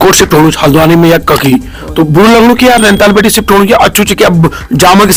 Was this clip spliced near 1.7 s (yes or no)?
no